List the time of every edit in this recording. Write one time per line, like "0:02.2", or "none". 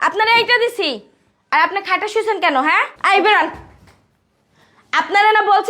0:02.9